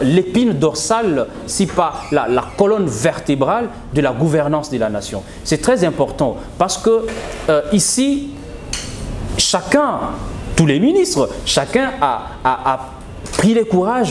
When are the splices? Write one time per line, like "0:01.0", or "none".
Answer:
none